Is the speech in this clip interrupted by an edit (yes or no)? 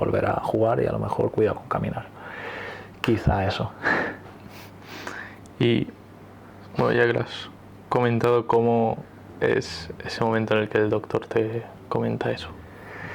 no